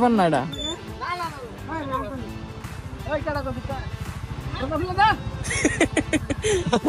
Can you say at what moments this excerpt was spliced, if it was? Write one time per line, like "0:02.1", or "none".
none